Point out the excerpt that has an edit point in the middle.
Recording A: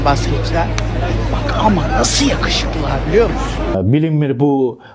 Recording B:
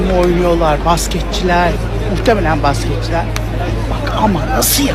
A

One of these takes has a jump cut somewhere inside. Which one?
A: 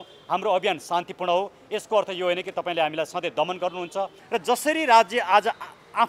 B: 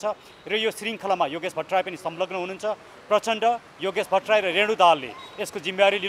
A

